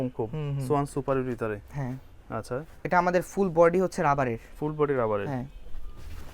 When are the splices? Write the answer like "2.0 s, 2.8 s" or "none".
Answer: none

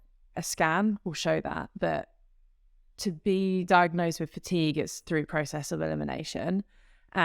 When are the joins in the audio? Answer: none

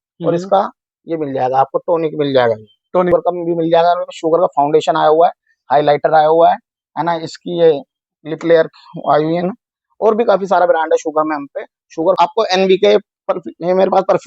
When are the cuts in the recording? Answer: 3.1 s, 12.2 s

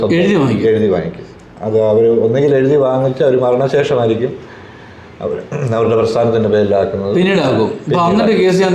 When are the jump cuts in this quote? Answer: none

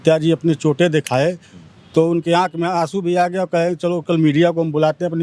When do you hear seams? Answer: none

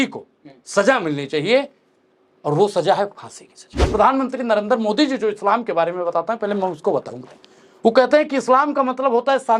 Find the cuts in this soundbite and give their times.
3.7 s

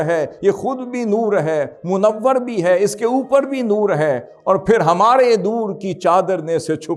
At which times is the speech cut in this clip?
none

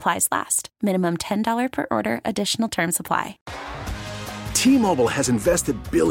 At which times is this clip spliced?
3.4 s

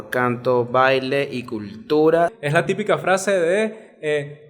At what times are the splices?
2.4 s

